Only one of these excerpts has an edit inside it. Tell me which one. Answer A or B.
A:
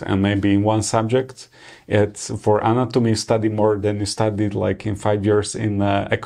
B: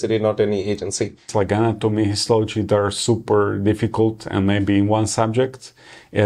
B